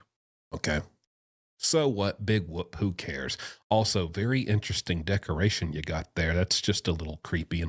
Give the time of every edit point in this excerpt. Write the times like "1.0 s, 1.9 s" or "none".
2.2 s